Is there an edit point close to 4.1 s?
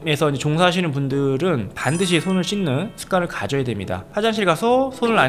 yes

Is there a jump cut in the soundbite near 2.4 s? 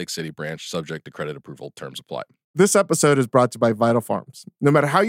yes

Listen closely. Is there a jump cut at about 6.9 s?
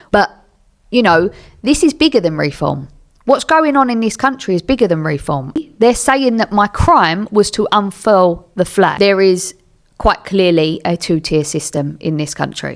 no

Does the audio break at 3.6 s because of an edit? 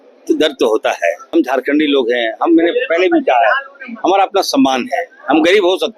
no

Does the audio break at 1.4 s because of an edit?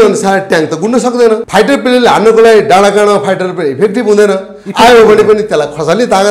yes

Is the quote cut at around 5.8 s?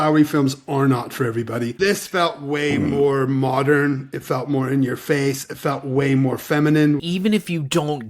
no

